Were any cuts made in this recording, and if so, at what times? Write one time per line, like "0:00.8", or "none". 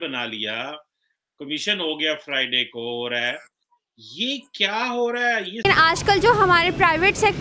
0:05.6